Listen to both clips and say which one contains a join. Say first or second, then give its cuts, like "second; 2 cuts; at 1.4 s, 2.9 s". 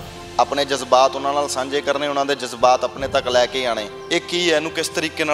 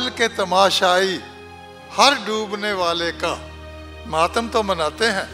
first; 1 cut; at 3.9 s